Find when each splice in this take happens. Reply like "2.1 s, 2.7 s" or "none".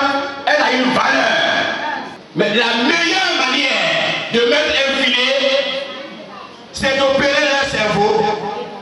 2.1 s